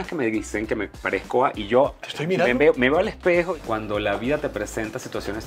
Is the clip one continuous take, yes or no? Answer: no